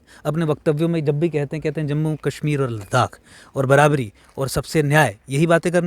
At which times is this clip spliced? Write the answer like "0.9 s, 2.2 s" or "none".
none